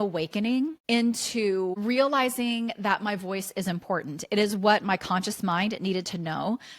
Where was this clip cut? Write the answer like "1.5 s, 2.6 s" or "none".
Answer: 0.8 s, 1.7 s